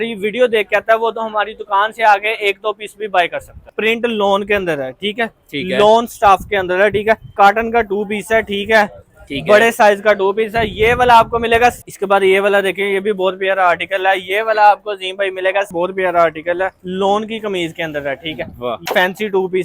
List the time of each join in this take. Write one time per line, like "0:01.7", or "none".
0:03.7
0:07.3
0:11.8
0:15.7
0:18.8